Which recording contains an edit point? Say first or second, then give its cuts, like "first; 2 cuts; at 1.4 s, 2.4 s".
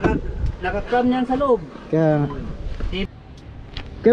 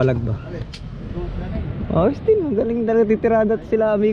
first; 1 cut; at 3.0 s